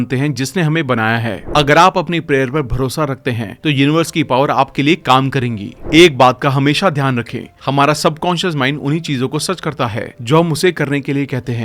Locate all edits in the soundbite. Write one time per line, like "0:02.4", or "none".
0:01.4
0:05.7